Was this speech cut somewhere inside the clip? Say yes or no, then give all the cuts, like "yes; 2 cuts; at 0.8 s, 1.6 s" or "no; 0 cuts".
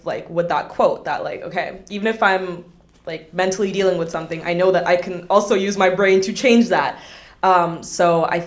no; 0 cuts